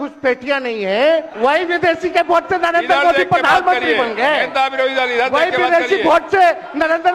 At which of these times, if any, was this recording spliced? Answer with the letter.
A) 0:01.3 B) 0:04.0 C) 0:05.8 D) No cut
A